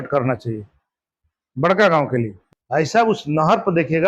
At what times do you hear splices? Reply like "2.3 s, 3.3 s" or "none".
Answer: 2.4 s